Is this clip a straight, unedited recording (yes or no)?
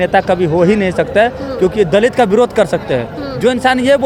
yes